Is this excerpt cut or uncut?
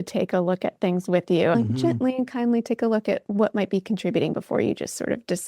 cut